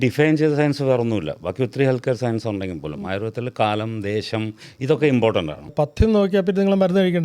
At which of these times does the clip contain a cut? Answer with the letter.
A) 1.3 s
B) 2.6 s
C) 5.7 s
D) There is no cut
C